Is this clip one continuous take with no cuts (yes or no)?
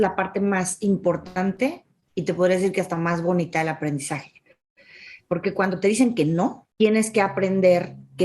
no